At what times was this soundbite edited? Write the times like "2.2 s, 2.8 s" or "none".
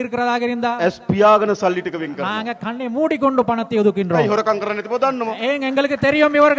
none